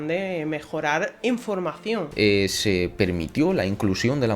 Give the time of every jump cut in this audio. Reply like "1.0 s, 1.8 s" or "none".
2.1 s